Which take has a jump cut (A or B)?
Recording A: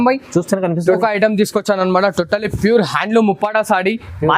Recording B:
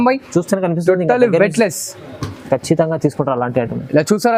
A